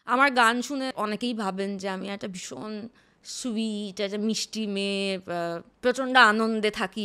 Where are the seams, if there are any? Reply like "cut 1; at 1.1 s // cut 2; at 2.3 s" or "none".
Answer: cut 1; at 0.9 s // cut 2; at 5.7 s